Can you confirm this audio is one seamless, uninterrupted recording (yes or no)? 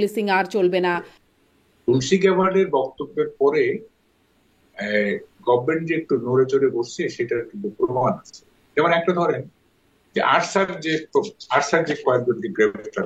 no